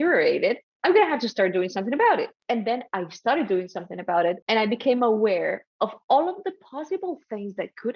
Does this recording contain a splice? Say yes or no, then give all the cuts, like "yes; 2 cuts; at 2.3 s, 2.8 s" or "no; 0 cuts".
yes; 2 cuts; at 2.3 s, 4.4 s